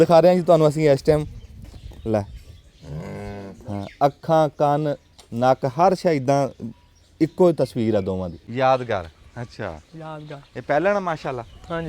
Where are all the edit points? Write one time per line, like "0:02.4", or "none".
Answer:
0:08.4